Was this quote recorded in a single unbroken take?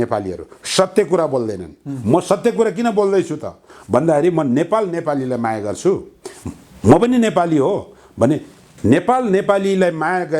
yes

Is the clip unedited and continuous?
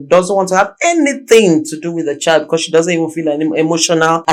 yes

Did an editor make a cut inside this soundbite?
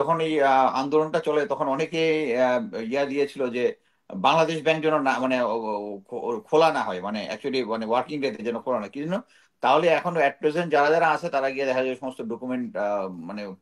no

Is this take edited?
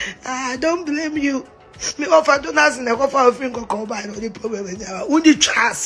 no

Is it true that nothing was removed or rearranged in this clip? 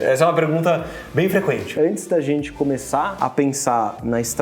no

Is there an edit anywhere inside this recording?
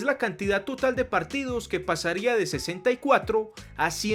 no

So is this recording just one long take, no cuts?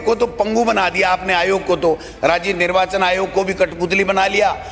yes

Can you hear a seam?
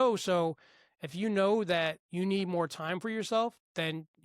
yes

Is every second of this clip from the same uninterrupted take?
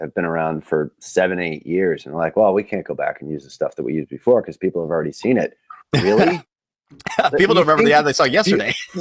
yes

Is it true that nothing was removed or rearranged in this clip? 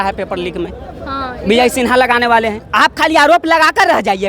no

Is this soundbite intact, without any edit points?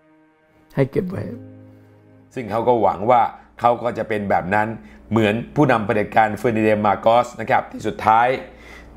no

